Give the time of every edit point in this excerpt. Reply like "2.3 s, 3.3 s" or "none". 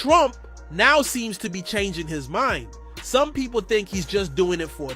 none